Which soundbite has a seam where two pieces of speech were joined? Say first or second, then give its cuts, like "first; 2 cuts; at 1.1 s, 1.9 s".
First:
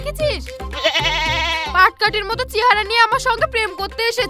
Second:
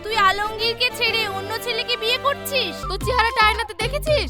second; 1 cut; at 2.8 s